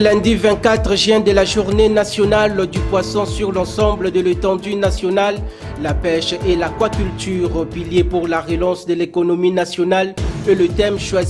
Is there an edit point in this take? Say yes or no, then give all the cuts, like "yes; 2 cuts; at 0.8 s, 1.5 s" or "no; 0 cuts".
no; 0 cuts